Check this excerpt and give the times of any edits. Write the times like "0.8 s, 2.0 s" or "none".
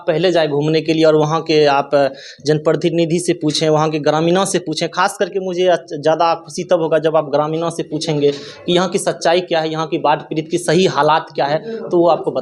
none